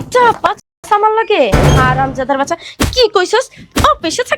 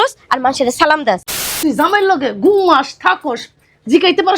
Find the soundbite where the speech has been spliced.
second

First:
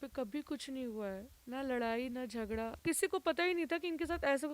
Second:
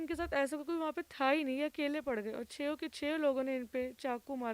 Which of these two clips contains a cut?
first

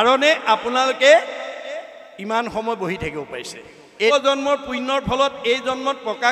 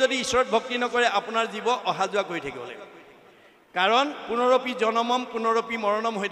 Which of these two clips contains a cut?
first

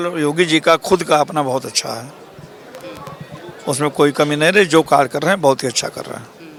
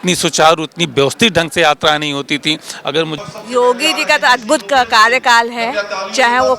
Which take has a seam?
second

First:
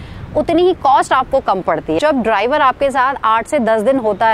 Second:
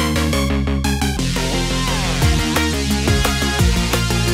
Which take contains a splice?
first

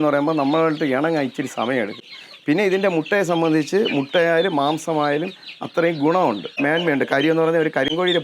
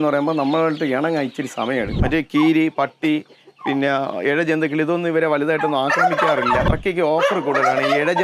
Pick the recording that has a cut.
second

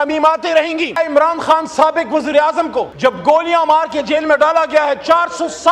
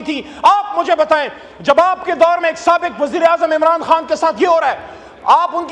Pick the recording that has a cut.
first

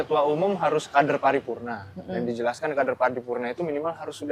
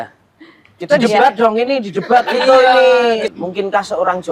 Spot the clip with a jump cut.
second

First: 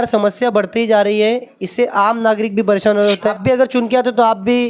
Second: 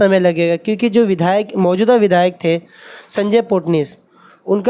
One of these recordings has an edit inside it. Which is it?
first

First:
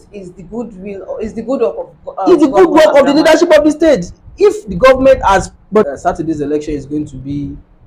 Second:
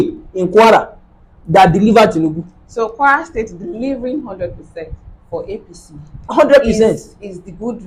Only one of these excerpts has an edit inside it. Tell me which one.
first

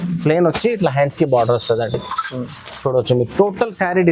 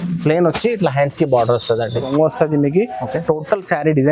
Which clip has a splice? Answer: second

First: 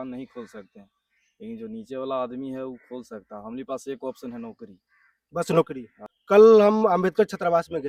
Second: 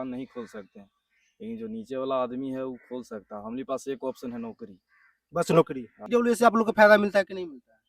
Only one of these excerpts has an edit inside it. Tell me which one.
second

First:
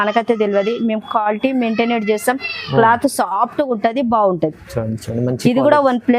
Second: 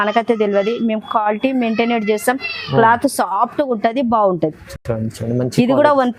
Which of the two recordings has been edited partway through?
first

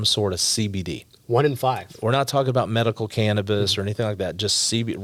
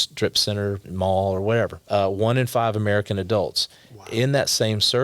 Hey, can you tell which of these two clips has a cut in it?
second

